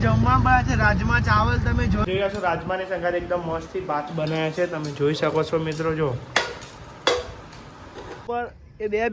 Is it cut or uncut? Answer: cut